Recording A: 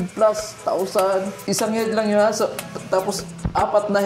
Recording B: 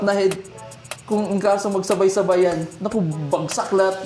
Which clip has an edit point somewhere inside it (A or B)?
A